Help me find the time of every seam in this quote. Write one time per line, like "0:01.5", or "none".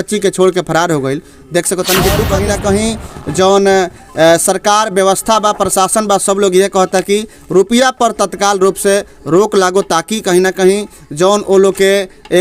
0:02.3